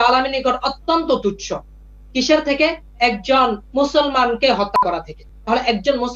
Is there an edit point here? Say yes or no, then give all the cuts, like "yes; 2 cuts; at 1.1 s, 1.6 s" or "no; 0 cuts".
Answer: no; 0 cuts